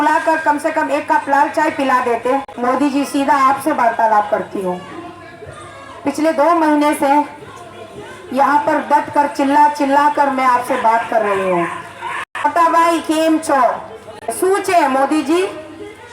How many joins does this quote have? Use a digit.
3